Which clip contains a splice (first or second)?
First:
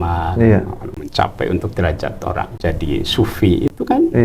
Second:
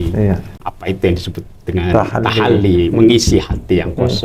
first